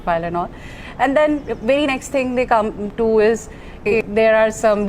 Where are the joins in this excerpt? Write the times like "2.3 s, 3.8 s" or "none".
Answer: 3.9 s